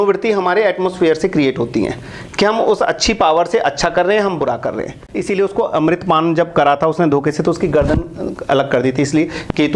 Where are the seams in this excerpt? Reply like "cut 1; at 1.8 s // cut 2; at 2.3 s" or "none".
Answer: cut 1; at 5.1 s